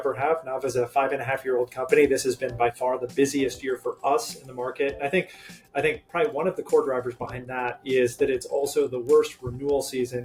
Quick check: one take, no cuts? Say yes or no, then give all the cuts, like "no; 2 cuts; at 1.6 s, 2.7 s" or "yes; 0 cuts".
yes; 0 cuts